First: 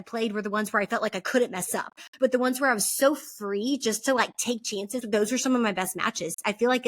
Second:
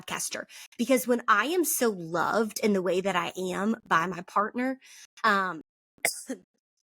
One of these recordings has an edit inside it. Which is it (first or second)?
first